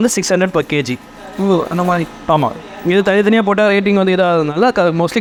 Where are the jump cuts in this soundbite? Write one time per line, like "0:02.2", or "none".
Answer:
none